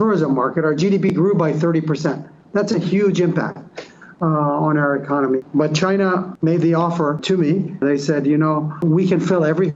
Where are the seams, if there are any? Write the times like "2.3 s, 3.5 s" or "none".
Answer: 5.4 s, 6.3 s, 7.7 s, 8.8 s